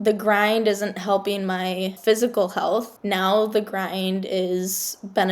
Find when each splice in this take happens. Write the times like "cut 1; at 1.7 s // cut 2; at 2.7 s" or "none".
cut 1; at 2.0 s // cut 2; at 2.9 s